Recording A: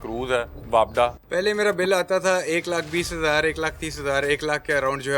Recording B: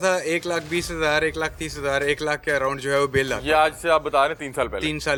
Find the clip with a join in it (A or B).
A